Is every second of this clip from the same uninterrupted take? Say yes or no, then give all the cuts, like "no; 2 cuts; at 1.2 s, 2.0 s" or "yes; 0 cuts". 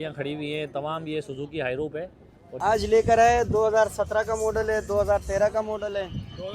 no; 1 cut; at 2.5 s